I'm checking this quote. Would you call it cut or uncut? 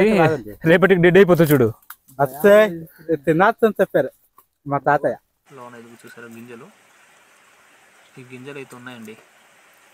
cut